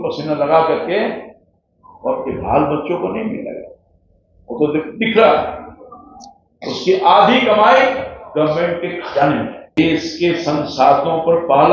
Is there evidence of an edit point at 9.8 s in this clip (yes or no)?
yes